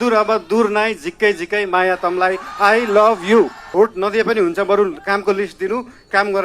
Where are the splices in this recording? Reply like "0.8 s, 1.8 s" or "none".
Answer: 3.6 s